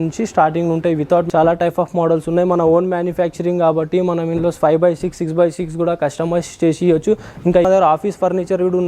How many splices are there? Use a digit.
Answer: 2